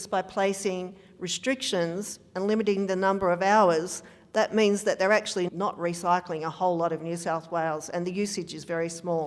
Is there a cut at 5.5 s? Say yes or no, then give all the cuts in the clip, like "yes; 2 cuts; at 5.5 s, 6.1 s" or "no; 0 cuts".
yes; 1 cut; at 5.5 s